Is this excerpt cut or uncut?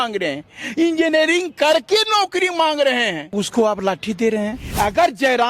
cut